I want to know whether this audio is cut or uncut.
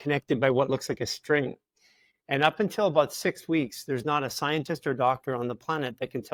uncut